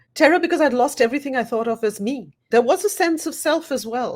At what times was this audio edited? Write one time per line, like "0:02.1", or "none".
0:02.4